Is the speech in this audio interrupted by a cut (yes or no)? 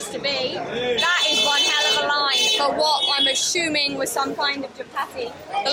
no